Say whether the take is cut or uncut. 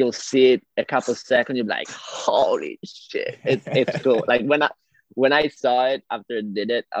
uncut